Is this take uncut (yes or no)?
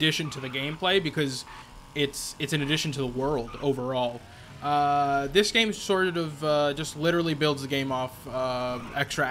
yes